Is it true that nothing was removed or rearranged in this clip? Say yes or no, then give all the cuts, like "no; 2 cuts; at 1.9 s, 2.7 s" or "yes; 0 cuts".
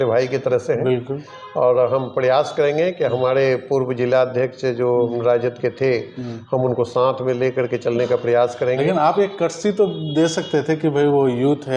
yes; 0 cuts